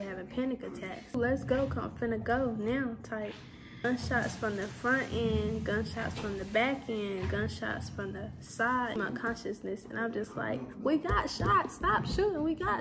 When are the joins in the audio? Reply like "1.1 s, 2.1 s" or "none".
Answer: 1.1 s, 3.8 s, 9.0 s